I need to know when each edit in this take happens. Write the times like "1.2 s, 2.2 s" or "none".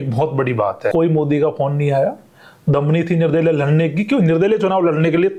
0.9 s